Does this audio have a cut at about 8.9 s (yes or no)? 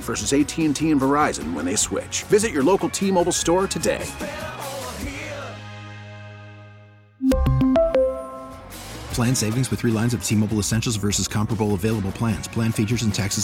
no